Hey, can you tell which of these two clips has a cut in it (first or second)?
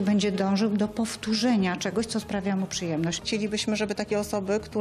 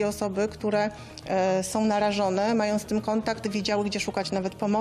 first